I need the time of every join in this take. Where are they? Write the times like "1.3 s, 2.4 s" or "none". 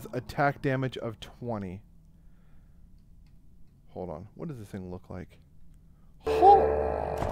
none